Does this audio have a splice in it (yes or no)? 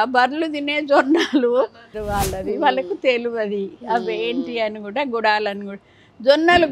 yes